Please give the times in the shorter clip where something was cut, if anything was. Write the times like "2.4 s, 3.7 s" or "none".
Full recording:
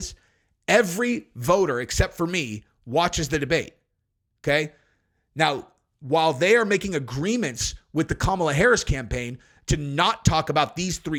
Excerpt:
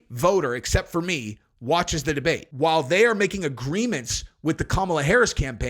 2.5 s

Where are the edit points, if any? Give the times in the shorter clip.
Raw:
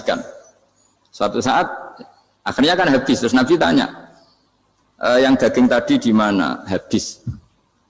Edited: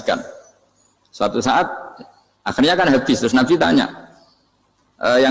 none

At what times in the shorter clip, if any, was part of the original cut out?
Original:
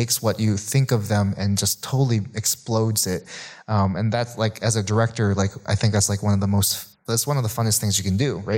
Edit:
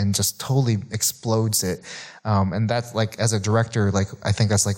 none

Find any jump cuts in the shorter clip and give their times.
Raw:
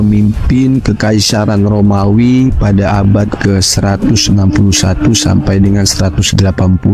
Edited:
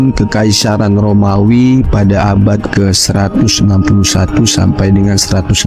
none

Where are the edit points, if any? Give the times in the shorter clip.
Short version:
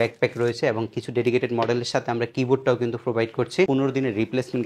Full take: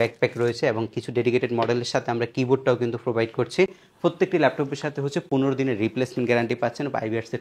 3.7 s

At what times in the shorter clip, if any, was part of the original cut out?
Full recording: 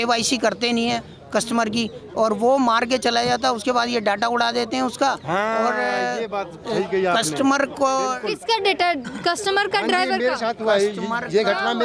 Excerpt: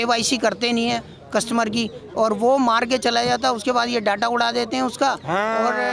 none

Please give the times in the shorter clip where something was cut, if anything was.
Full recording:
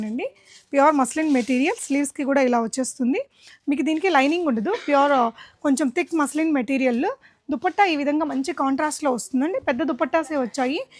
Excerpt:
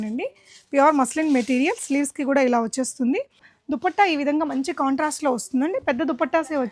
3.5 s

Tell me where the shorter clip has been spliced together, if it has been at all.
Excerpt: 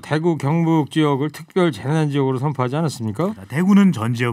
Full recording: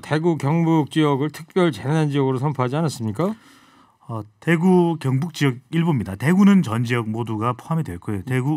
3.4 s

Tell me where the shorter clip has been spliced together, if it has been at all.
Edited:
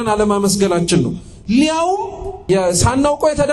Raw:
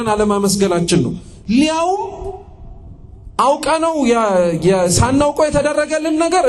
2.4 s

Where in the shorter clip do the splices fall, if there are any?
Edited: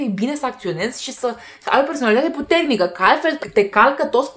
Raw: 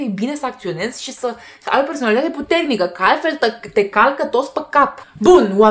3.4 s

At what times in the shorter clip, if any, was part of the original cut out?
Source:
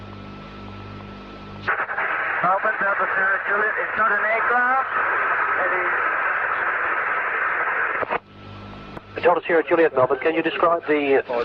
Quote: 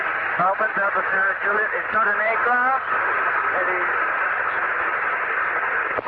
none

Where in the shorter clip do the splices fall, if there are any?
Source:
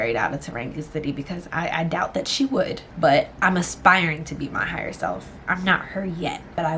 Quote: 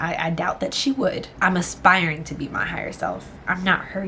1.3 s

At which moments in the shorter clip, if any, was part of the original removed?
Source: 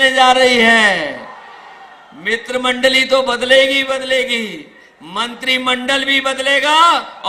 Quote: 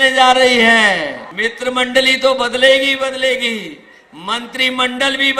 1.2 s

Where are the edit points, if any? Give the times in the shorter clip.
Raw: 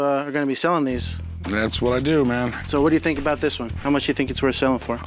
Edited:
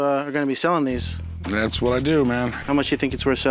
2.6 s

